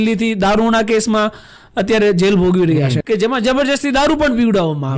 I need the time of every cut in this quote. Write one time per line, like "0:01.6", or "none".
0:03.0